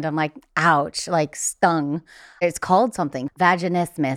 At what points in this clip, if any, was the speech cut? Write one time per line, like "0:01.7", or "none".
0:02.4
0:03.2